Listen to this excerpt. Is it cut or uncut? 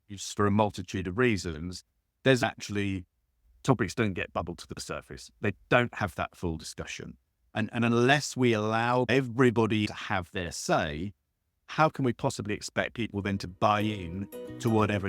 cut